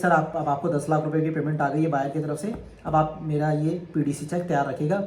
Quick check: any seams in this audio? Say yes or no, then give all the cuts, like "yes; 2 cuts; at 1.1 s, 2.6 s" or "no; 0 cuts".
no; 0 cuts